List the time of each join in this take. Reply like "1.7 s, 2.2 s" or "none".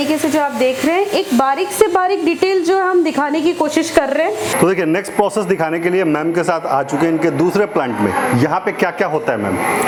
none